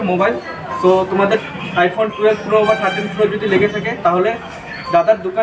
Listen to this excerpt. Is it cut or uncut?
uncut